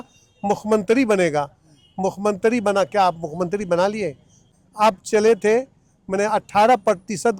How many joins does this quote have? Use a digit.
1